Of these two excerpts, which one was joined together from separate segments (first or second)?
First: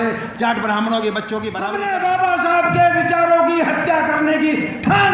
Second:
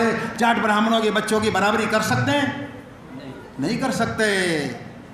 first